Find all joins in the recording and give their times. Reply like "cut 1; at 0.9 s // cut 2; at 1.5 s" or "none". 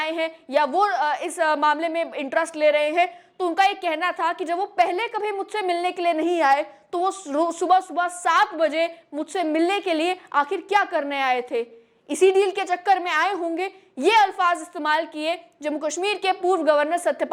none

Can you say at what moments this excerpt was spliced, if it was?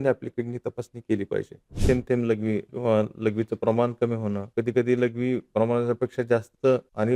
cut 1; at 1.7 s

